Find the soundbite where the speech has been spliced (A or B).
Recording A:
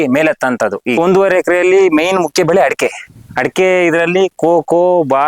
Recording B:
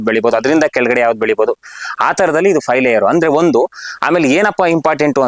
A